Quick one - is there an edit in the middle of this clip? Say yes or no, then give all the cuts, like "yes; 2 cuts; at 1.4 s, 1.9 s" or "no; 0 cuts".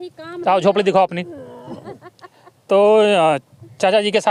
no; 0 cuts